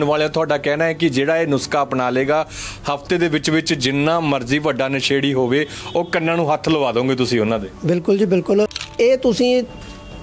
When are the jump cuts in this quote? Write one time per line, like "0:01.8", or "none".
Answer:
0:08.9